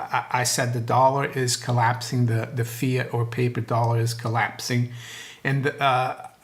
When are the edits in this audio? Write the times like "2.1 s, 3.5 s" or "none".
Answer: none